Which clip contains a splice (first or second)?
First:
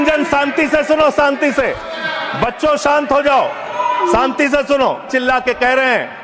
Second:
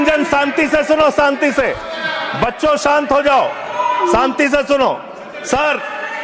first